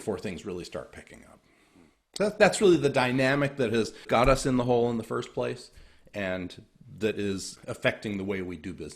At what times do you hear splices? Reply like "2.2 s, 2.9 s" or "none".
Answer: 4.0 s, 7.5 s